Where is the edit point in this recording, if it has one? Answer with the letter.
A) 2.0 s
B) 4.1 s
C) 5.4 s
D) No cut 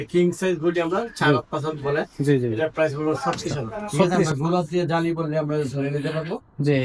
B